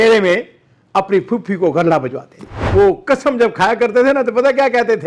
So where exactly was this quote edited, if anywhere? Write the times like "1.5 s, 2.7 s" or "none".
2.5 s